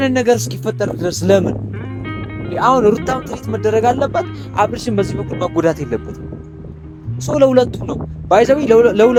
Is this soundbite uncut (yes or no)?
yes